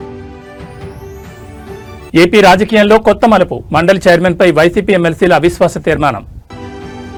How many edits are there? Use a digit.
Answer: 0